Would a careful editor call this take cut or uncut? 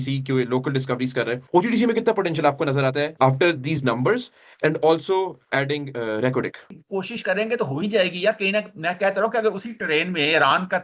cut